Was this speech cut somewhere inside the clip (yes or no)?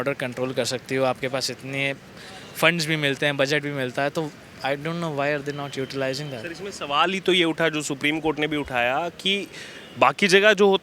no